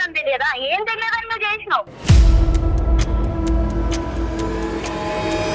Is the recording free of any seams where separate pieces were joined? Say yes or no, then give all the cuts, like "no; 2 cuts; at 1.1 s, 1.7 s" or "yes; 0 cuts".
no; 1 cut; at 1.9 s